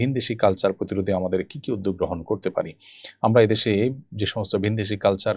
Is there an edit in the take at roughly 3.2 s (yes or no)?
no